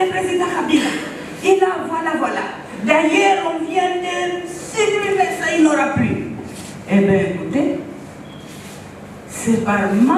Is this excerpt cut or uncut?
uncut